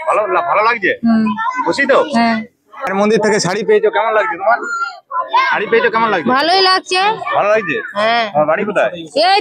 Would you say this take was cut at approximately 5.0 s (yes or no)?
no